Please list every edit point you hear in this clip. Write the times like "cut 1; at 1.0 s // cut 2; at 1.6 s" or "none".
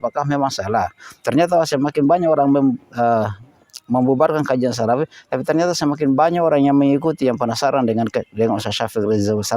none